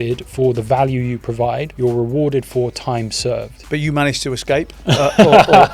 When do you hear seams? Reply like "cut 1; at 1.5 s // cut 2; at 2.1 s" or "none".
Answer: cut 1; at 1.7 s // cut 2; at 3.6 s // cut 3; at 4.7 s